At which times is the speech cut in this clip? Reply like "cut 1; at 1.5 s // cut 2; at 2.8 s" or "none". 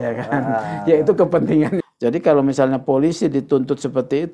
cut 1; at 1.7 s